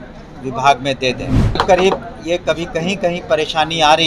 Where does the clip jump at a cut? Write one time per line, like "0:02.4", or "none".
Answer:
0:01.6